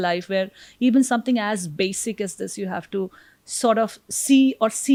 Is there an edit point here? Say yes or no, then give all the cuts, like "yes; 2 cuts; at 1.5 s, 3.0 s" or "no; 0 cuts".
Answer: no; 0 cuts